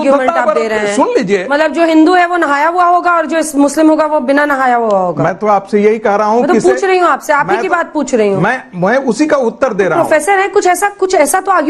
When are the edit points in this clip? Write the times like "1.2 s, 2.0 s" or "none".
none